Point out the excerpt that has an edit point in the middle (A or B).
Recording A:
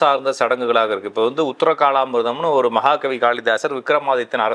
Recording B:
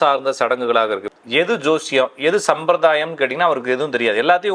B